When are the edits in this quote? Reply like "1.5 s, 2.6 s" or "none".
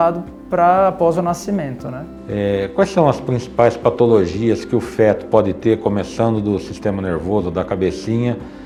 none